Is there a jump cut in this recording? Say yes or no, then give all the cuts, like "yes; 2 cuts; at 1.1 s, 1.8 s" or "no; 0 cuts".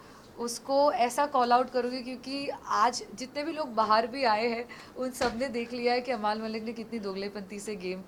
no; 0 cuts